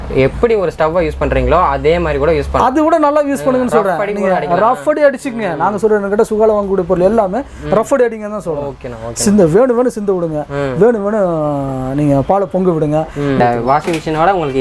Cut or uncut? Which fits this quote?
cut